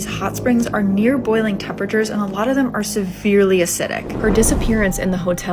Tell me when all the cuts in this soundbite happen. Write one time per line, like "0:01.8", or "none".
0:04.0